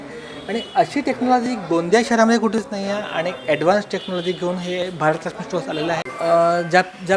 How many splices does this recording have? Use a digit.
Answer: 0